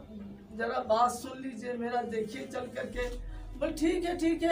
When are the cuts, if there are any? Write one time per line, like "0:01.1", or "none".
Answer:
none